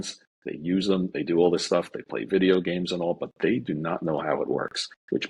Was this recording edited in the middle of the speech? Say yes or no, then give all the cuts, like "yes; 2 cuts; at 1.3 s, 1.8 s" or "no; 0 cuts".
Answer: no; 0 cuts